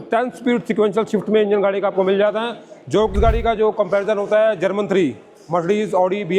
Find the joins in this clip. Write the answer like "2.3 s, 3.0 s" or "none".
3.1 s